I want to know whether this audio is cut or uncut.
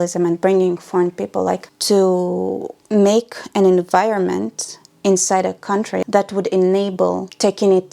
cut